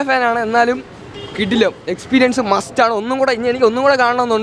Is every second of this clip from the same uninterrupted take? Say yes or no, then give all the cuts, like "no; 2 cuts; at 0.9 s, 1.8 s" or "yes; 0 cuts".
yes; 0 cuts